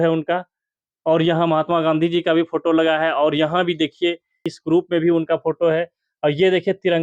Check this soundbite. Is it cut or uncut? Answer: cut